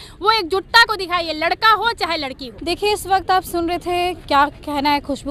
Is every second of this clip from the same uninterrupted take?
yes; 0 cuts

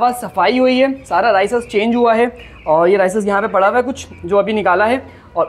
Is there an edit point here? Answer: no; 0 cuts

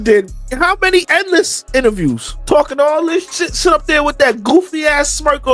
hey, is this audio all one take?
no; 1 cut; at 1.1 s

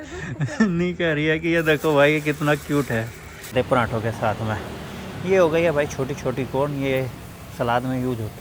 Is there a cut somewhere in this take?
yes; 1 cut; at 3.5 s

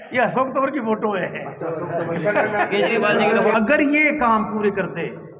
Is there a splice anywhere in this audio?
yes; 1 cut; at 3.5 s

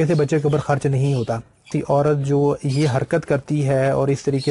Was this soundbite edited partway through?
yes; 1 cut; at 1.7 s

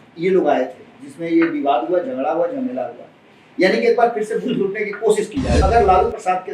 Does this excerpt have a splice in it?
yes; 1 cut; at 5.6 s

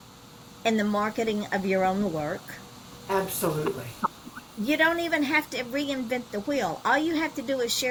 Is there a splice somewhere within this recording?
no; 0 cuts

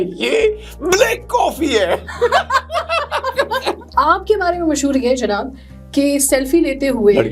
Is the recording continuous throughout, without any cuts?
no; 1 cut; at 3.8 s

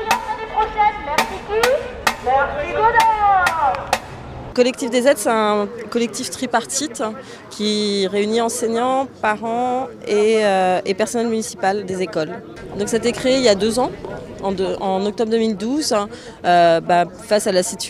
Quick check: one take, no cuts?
yes; 0 cuts

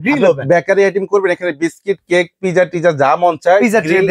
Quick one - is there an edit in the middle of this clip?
no; 0 cuts

